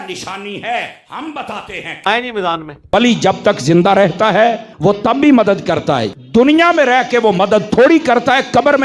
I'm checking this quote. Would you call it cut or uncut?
uncut